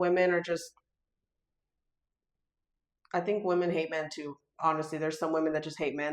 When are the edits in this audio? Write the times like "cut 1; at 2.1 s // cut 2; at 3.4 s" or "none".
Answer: none